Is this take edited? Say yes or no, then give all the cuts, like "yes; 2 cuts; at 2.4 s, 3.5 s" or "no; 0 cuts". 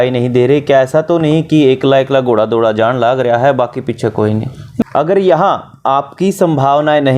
yes; 1 cut; at 4.8 s